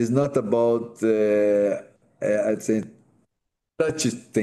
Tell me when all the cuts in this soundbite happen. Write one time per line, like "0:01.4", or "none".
none